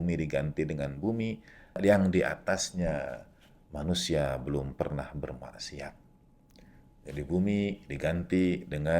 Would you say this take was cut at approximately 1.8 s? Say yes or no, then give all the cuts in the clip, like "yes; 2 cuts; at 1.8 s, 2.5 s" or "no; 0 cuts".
yes; 1 cut; at 1.8 s